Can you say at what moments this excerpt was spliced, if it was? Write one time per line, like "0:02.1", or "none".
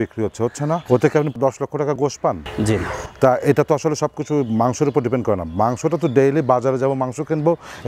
none